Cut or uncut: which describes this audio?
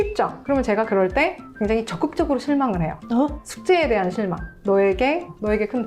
cut